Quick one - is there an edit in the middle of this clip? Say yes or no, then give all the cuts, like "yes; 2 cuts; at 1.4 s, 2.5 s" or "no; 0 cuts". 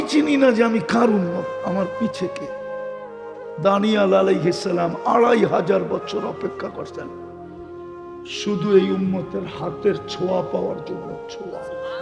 no; 0 cuts